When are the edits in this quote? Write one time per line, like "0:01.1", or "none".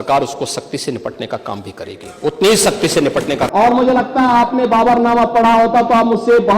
0:03.5